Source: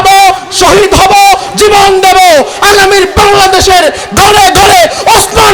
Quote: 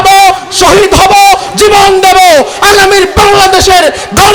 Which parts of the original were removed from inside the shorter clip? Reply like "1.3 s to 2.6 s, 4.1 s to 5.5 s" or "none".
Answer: none